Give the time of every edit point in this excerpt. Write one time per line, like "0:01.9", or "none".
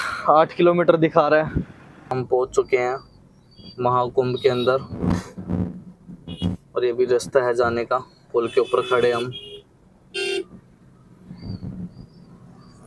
0:02.1